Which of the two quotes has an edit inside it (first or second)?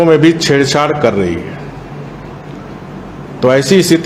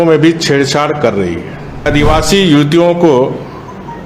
second